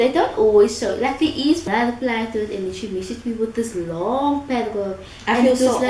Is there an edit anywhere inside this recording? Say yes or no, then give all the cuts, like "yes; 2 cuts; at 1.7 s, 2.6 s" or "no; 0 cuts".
yes; 1 cut; at 1.6 s